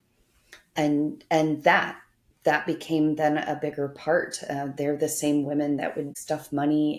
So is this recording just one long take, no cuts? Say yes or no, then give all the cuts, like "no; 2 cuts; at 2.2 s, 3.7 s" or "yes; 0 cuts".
yes; 0 cuts